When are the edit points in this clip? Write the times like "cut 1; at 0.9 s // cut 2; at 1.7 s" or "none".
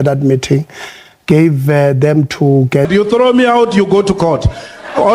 cut 1; at 2.9 s